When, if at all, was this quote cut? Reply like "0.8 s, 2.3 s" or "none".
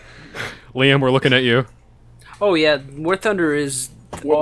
2.3 s